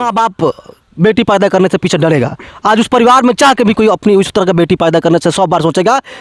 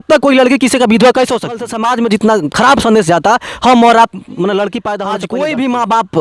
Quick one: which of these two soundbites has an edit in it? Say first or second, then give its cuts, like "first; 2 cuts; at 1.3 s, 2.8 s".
second; 2 cuts; at 1.8 s, 4.8 s